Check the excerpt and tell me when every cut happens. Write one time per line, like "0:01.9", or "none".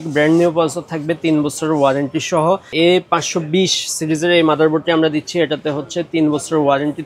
0:02.7